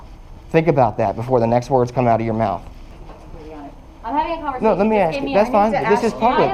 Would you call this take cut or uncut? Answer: cut